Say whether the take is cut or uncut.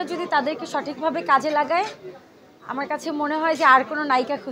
uncut